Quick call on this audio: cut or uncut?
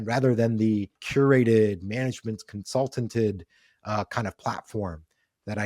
cut